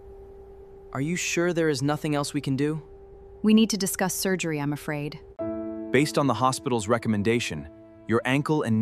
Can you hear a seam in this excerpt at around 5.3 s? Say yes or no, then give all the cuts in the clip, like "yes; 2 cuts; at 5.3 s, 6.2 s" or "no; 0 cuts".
yes; 1 cut; at 5.3 s